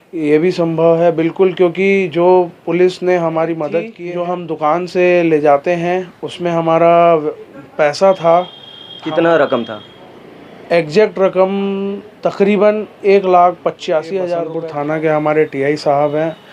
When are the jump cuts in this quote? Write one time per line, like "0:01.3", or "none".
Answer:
0:04.0
0:14.5